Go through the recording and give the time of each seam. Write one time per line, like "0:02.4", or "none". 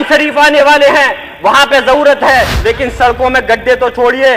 0:02.5